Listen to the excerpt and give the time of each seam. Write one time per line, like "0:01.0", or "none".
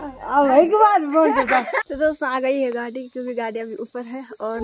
0:01.8